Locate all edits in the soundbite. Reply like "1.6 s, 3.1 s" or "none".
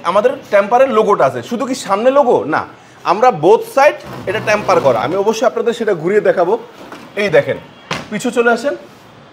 none